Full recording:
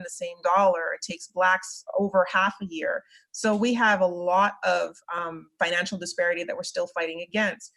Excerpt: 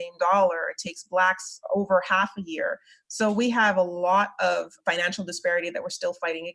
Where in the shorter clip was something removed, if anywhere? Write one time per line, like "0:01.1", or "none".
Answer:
0:04.7